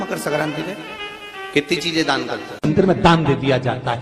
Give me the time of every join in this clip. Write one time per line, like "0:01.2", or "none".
0:02.7